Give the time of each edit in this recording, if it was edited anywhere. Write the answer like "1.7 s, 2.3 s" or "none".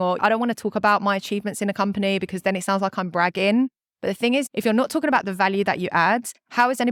none